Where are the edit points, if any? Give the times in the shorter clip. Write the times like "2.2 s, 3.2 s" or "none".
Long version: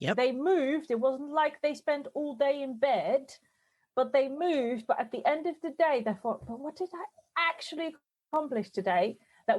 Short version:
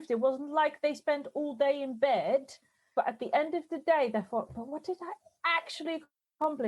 2.9 s